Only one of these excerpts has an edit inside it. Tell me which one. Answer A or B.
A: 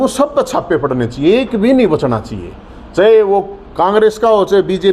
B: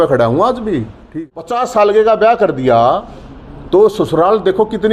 B